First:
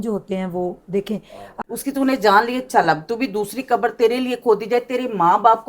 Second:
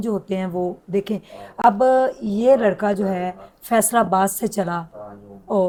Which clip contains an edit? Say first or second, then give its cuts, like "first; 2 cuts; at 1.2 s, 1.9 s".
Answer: first; 1 cut; at 1.5 s